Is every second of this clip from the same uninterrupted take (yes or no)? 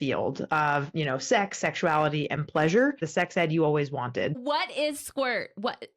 no